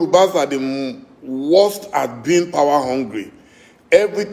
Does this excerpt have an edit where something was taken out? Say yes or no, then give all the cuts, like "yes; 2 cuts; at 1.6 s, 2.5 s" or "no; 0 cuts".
no; 0 cuts